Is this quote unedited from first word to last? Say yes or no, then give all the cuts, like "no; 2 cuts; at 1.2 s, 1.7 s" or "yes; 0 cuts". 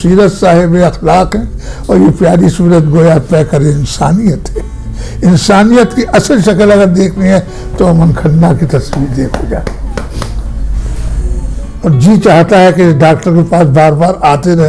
no; 1 cut; at 11.7 s